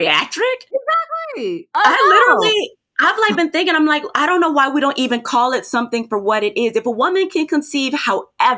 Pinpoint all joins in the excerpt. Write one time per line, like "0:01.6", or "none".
0:01.7